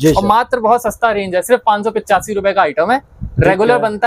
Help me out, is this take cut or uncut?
uncut